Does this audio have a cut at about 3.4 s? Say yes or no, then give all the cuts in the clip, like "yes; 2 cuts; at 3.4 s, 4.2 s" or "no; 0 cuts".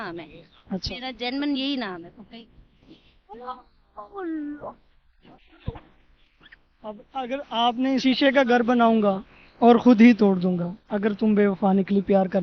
yes; 2 cuts; at 3.4 s, 8.0 s